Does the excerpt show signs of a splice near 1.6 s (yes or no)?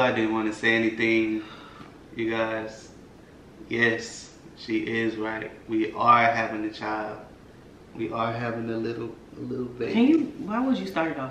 no